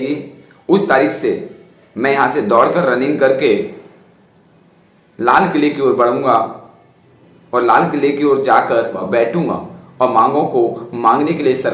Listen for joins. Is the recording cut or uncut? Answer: cut